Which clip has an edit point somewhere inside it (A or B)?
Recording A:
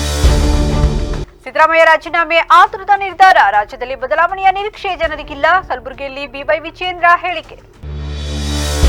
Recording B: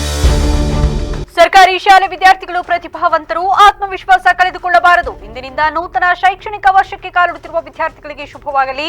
B